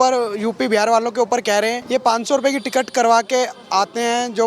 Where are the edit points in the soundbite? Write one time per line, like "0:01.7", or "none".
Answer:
0:01.8